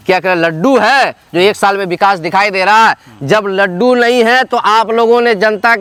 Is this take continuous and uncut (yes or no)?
yes